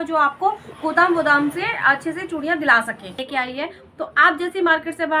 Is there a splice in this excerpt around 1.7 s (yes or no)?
no